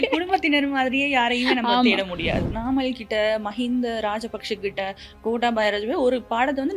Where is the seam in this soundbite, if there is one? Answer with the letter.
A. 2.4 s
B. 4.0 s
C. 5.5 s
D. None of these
A